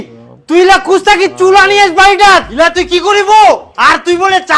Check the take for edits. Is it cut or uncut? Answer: cut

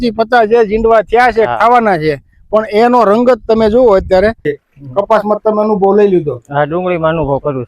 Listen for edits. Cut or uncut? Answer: cut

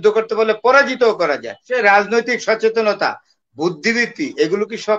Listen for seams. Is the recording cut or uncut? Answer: cut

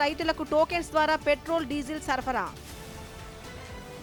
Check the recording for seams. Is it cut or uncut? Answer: uncut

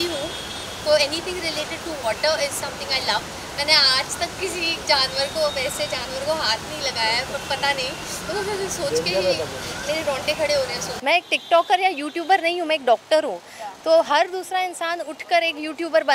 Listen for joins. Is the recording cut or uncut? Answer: cut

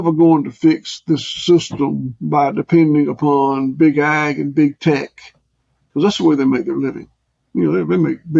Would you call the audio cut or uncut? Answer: cut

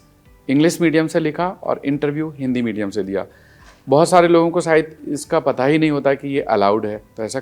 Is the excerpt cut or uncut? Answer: uncut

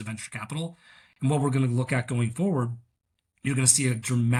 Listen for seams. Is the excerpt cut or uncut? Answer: uncut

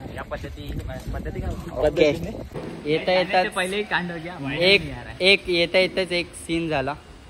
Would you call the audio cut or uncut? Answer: cut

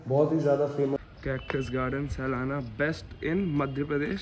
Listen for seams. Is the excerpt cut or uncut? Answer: cut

